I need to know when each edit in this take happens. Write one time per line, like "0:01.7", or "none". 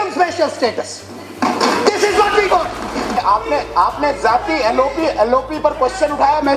0:03.2

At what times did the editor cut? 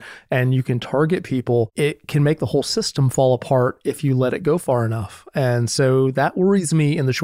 0:01.7

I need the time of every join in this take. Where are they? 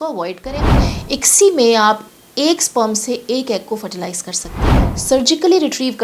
0:00.9
0:04.9

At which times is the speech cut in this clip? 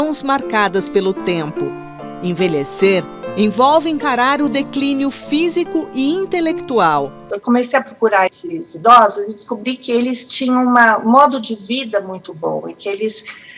0:07.3

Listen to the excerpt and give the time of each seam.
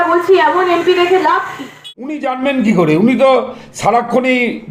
0:02.1

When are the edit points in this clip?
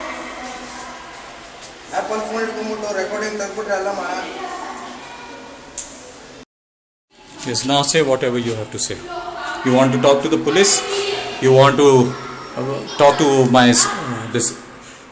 none

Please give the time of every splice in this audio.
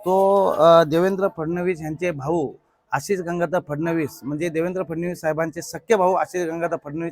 none

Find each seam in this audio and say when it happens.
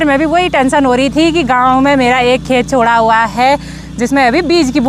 none

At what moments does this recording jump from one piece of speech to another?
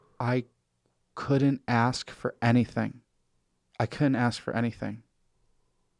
none

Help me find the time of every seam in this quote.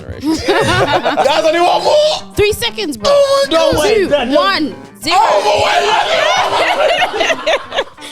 0:01.2

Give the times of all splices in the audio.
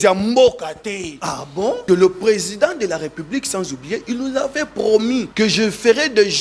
0:01.8
0:05.3

